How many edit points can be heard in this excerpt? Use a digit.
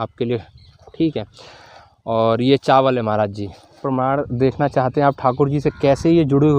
1